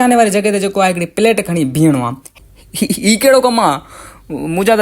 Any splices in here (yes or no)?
yes